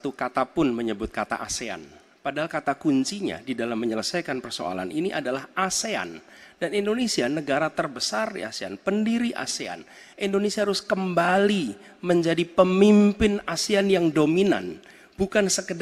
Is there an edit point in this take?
no; 0 cuts

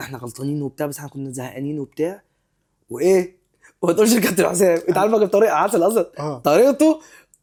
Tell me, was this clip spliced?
no; 0 cuts

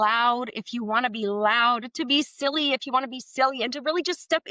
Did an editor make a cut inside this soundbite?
no; 0 cuts

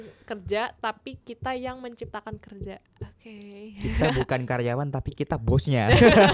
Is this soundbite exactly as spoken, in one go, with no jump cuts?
yes; 0 cuts

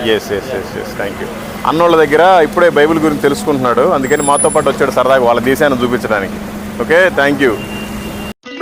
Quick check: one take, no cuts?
yes; 0 cuts

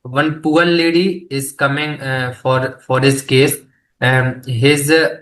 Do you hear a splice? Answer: no; 0 cuts

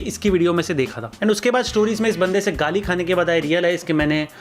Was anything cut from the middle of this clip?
yes; 1 cut; at 1.0 s

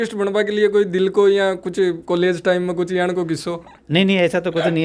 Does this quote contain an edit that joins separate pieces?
no; 0 cuts

